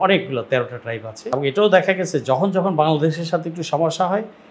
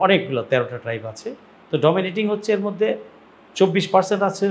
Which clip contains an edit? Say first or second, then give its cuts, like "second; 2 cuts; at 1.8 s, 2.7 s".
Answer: first; 1 cut; at 1.1 s